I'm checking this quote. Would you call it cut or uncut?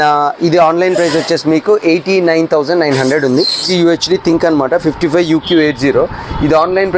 cut